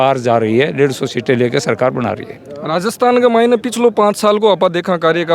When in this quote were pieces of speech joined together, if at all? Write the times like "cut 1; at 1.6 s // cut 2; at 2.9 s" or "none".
none

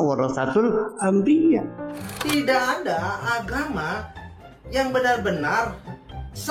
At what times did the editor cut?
cut 1; at 2.1 s

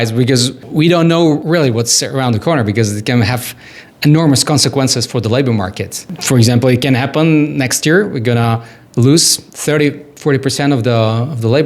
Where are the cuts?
cut 1; at 1.4 s

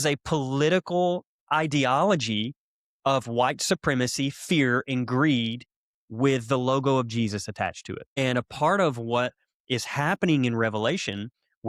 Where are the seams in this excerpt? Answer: cut 1; at 8.1 s

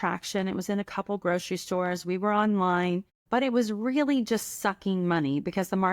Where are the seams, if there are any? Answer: cut 1; at 3.1 s

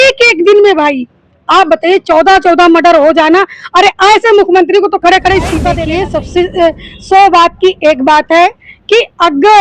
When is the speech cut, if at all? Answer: cut 1; at 5.8 s

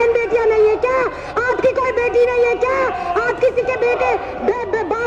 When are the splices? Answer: none

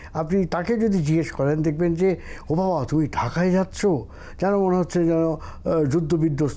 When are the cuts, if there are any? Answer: none

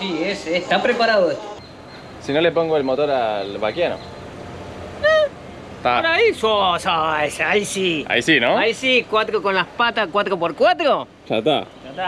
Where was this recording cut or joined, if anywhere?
cut 1; at 1.5 s

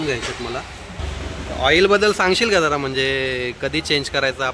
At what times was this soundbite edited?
cut 1; at 1.0 s

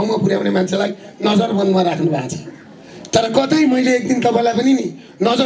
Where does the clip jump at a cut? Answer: none

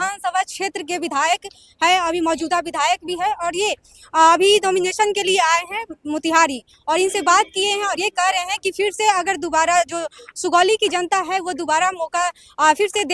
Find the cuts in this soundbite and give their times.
none

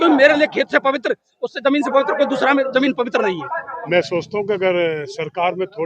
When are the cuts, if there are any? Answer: cut 1; at 3.7 s

